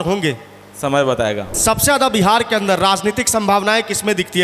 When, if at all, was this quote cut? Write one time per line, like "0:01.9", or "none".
0:01.5